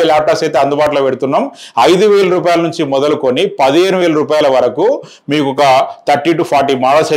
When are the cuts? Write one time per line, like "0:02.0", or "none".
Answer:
none